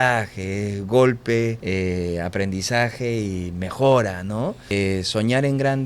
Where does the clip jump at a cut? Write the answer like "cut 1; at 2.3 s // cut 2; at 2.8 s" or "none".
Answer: cut 1; at 1.6 s // cut 2; at 4.6 s